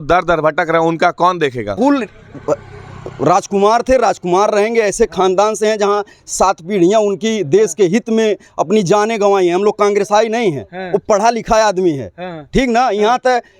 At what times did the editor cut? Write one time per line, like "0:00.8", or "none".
0:01.8